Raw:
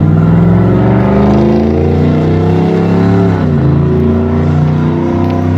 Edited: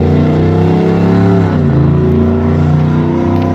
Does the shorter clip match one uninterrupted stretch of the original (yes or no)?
yes